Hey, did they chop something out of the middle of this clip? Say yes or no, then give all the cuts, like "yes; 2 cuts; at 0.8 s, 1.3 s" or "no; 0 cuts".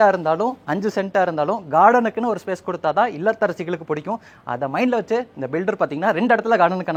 no; 0 cuts